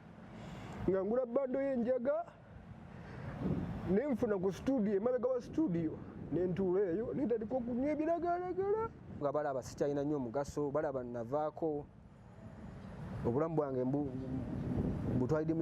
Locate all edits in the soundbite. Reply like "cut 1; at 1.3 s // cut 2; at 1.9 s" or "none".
cut 1; at 9.2 s